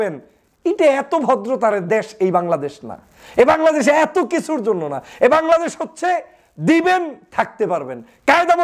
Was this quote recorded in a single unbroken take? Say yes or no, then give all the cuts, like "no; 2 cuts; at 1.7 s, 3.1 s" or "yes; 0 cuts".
yes; 0 cuts